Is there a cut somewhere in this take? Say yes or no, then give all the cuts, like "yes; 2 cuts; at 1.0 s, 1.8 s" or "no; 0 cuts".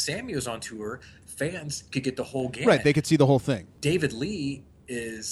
yes; 1 cut; at 3.7 s